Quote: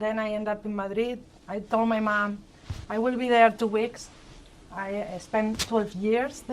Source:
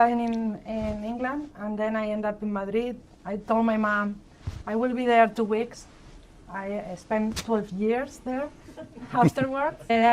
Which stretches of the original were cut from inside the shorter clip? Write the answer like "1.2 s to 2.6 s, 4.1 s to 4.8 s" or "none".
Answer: none